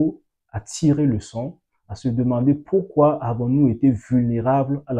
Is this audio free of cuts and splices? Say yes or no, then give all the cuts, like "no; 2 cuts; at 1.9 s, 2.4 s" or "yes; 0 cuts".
yes; 0 cuts